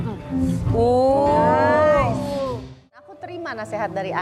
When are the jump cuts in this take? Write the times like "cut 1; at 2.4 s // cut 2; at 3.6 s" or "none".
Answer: cut 1; at 2.9 s